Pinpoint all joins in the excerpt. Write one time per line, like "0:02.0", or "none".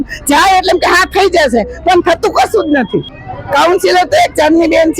0:03.2